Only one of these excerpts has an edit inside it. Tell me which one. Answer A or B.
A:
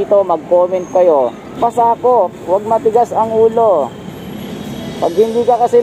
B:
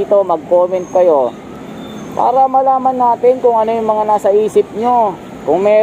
A